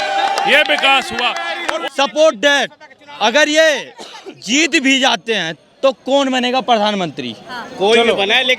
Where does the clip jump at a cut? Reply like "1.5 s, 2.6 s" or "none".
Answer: 1.8 s